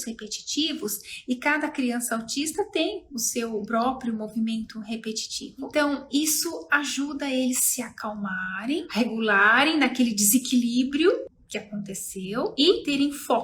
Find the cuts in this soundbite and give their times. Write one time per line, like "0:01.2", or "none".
none

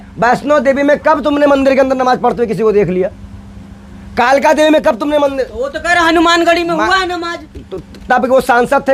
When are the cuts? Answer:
none

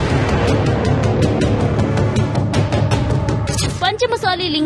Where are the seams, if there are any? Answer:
none

